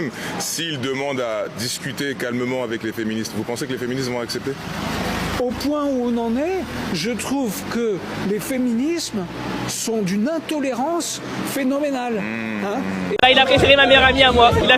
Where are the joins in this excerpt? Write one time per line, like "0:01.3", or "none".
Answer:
0:13.2